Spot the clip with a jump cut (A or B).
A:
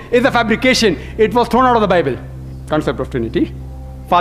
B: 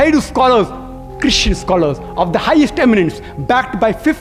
A